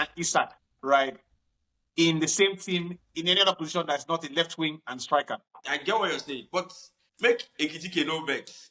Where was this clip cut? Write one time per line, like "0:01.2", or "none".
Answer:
0:05.7